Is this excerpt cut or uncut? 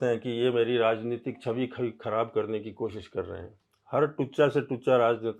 uncut